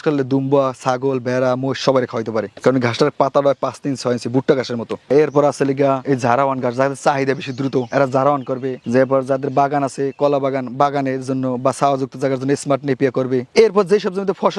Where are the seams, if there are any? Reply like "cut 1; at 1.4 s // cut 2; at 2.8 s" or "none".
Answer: none